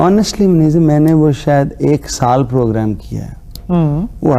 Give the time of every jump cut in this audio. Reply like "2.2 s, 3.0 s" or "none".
none